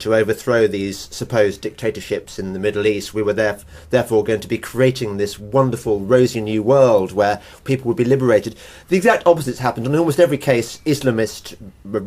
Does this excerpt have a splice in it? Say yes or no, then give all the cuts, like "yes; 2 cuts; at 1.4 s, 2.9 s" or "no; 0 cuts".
no; 0 cuts